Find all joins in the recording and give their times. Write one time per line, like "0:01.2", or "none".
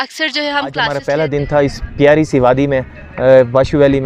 0:00.9